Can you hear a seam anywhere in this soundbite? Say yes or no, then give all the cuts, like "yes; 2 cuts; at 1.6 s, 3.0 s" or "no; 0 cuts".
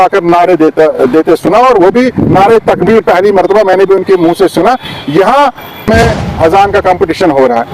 yes; 1 cut; at 5.9 s